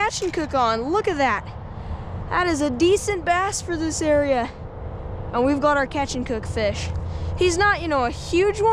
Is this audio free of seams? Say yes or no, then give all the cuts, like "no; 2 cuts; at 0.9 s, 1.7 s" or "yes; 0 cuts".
yes; 0 cuts